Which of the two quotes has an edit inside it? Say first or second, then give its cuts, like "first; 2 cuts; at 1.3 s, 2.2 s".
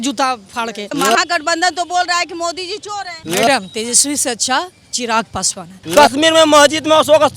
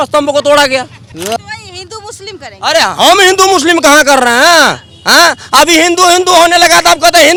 first; 3 cuts; at 0.9 s, 3.2 s, 5.7 s